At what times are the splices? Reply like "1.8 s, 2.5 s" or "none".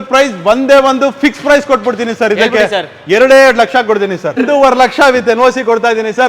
4.4 s